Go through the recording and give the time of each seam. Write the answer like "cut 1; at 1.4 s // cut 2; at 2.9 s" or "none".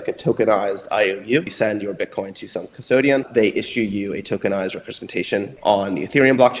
cut 1; at 1.5 s // cut 2; at 3.3 s // cut 3; at 5.5 s